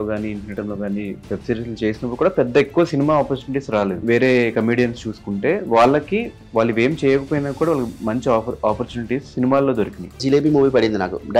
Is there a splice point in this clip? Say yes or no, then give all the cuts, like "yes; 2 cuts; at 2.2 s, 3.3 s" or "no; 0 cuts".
yes; 2 cuts; at 4.0 s, 10.2 s